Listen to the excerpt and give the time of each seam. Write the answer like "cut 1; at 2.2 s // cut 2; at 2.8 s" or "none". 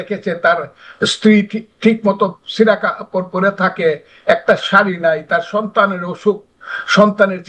none